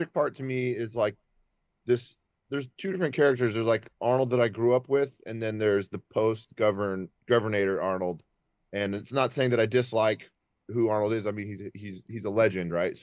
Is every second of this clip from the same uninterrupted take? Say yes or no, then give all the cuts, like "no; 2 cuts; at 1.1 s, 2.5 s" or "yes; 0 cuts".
yes; 0 cuts